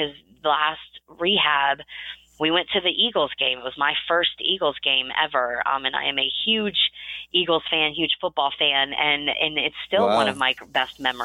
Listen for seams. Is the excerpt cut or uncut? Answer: uncut